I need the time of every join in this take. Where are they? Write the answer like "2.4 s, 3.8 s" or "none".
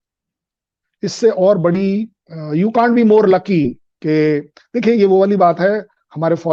none